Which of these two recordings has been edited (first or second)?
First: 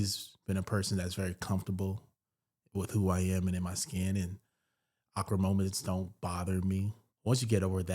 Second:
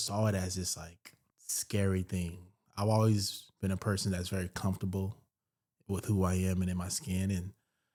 first